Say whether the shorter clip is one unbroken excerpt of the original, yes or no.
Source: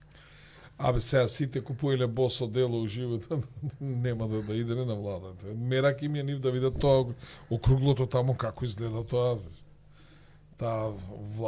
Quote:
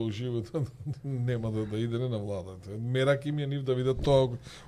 yes